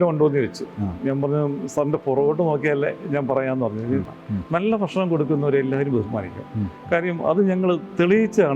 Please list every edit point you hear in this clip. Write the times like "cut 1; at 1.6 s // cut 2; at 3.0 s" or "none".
cut 1; at 4.1 s